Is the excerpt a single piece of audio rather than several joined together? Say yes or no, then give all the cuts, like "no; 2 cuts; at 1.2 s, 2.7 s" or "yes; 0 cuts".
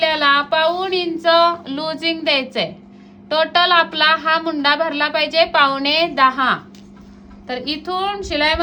yes; 0 cuts